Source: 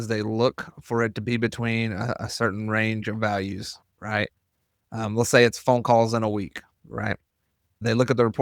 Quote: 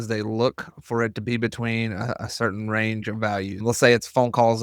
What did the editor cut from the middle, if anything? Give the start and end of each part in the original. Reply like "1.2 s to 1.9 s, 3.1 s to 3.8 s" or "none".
3.6 s to 5.1 s